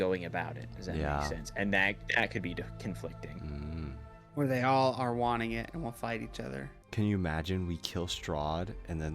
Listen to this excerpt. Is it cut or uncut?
cut